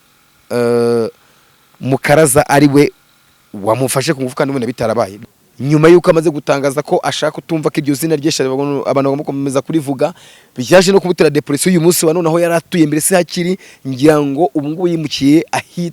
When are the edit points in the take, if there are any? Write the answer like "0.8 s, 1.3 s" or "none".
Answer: 5.1 s